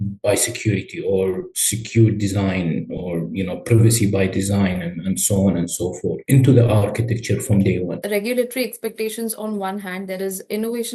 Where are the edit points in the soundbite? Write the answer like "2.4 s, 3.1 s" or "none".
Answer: 8.0 s